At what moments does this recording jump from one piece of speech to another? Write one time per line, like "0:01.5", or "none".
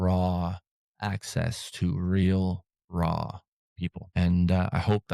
0:04.0